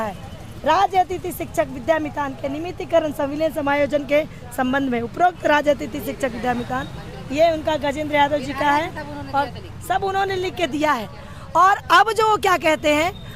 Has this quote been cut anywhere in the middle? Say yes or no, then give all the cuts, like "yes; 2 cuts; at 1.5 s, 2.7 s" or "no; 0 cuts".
no; 0 cuts